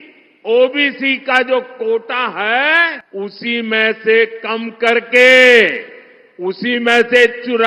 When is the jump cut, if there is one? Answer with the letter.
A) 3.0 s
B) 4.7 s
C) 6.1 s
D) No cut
A